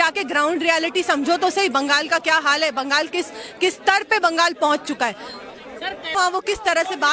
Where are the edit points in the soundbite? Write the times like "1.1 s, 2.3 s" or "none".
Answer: 6.1 s